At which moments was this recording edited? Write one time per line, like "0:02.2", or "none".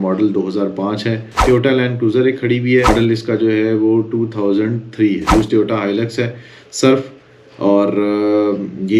0:01.3
0:02.9
0:05.3